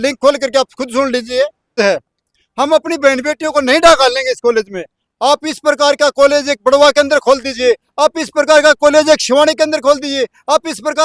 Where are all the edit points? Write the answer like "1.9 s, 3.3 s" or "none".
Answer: 1.8 s